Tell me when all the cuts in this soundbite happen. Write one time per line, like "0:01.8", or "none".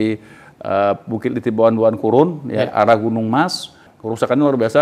0:03.8